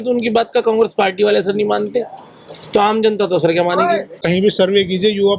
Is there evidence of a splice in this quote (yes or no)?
yes